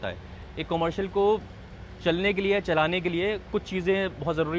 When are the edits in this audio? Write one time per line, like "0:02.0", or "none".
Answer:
none

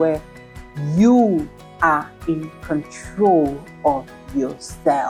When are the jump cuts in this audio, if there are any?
none

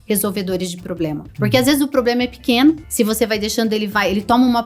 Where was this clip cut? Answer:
0:01.3
0:02.9

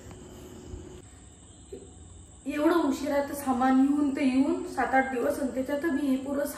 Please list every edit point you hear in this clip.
0:01.1

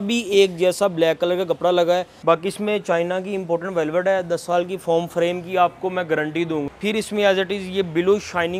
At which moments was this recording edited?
0:02.1
0:06.7

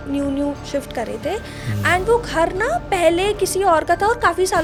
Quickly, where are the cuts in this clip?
none

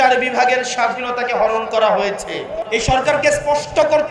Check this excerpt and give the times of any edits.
0:02.5

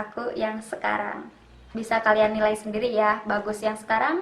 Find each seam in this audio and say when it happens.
none

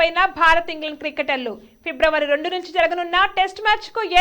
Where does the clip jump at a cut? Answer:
none

